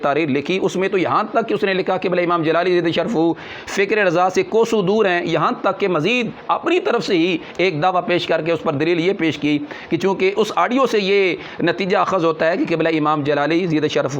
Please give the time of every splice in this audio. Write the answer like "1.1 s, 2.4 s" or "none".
none